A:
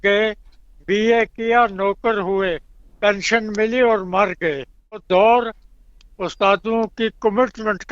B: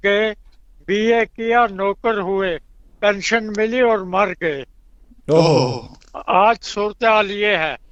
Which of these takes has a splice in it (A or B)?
A